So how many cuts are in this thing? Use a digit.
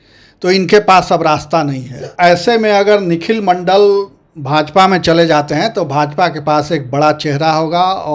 1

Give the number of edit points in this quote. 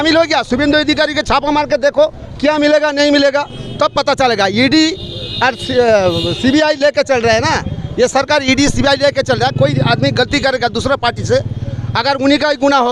0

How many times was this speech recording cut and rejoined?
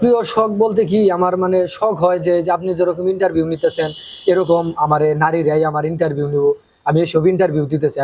0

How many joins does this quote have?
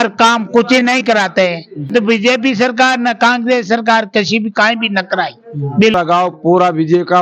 2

